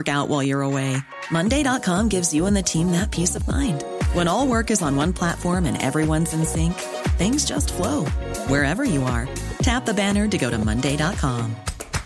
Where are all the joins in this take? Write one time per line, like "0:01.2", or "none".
none